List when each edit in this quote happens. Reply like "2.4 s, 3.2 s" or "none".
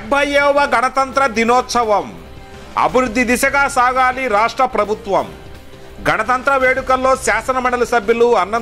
none